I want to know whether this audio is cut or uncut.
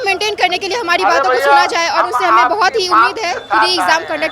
uncut